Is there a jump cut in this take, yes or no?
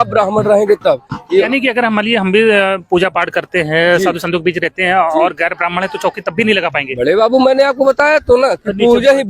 yes